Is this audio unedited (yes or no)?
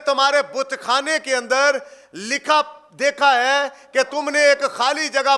no